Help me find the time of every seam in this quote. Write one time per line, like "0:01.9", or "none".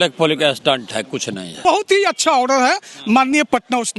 0:01.6

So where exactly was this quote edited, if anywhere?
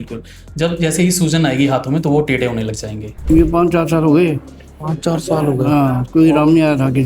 0:03.1

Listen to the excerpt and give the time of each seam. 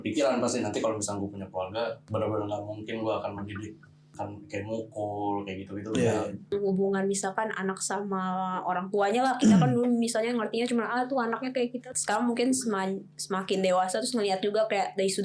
0:02.0
0:04.1
0:06.5
0:11.9

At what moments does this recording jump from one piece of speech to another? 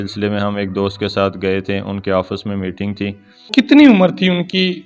0:03.5

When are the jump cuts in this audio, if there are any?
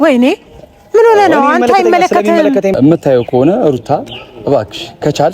0:02.8

